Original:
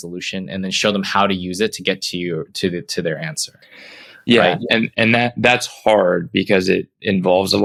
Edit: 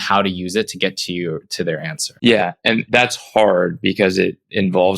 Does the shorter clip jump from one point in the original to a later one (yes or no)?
yes